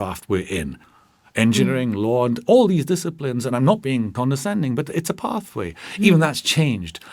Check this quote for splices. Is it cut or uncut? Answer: cut